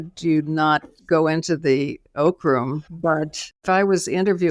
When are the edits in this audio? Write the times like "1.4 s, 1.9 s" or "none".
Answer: 3.5 s